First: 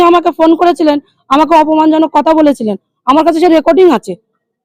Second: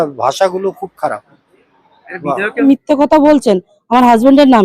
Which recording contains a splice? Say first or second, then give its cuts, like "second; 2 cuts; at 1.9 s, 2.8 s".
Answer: second; 1 cut; at 2.6 s